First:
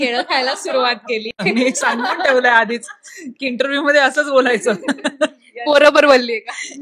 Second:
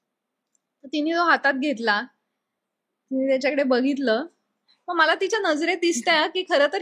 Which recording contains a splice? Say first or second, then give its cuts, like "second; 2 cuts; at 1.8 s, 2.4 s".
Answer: first; 1 cut; at 1.4 s